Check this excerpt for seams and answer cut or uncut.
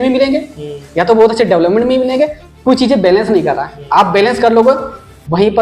uncut